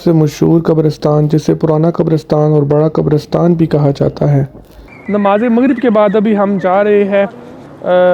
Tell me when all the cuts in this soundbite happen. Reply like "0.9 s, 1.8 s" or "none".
4.9 s